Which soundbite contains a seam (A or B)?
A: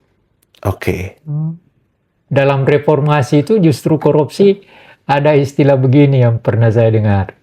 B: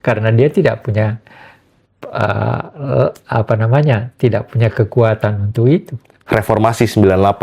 B